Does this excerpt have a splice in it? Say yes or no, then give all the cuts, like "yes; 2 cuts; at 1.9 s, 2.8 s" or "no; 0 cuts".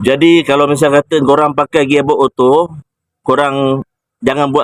no; 0 cuts